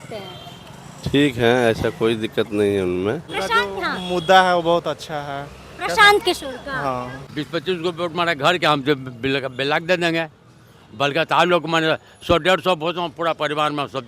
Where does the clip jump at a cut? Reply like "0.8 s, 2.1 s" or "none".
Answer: 3.3 s, 7.2 s